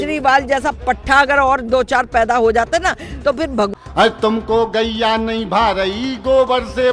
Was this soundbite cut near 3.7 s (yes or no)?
yes